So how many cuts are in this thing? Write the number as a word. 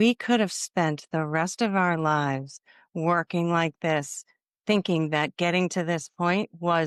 zero